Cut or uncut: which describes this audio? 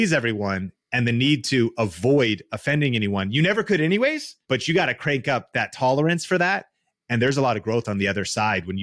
cut